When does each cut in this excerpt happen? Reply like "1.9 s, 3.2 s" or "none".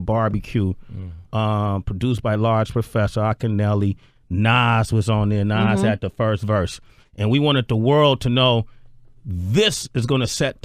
5.0 s